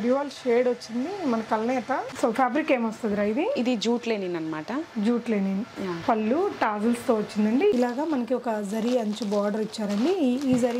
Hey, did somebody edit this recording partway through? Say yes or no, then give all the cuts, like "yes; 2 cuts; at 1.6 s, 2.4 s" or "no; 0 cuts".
yes; 2 cuts; at 2.1 s, 7.7 s